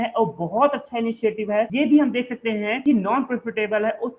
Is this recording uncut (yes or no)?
no